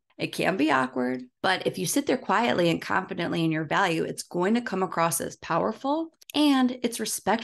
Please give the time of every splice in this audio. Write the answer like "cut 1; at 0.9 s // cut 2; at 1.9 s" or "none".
none